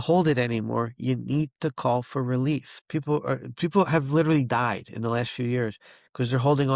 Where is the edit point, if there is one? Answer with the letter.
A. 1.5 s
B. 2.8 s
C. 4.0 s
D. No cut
B